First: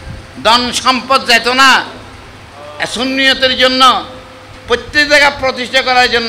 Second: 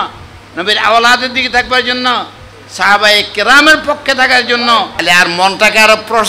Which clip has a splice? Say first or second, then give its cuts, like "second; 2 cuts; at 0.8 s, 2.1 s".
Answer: second; 1 cut; at 5.0 s